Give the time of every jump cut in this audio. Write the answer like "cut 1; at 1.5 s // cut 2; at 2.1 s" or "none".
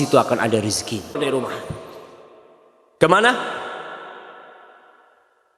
cut 1; at 1.2 s